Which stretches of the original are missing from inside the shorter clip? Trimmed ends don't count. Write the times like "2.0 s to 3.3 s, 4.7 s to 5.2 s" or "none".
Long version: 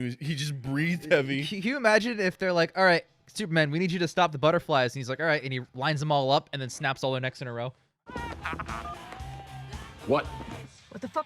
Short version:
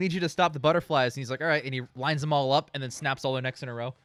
none